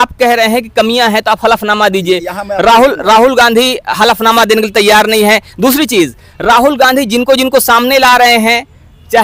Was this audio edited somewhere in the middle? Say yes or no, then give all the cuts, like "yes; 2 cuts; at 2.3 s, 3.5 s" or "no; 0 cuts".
no; 0 cuts